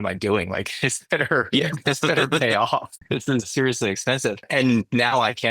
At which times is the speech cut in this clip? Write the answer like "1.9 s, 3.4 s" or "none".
3.4 s, 4.5 s

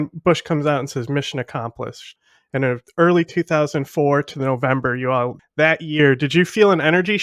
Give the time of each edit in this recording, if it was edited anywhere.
2.1 s, 5.4 s

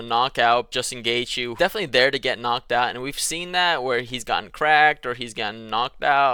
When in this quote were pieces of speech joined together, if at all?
none

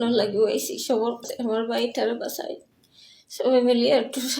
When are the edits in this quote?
1.3 s

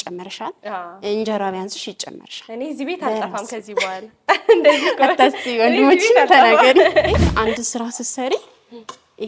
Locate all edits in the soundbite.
7.2 s

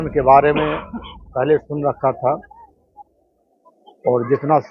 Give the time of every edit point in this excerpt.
none

